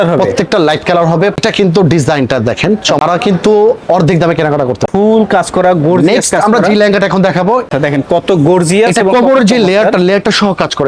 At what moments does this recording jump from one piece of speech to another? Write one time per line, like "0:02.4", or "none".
0:01.4
0:03.0
0:04.8
0:07.7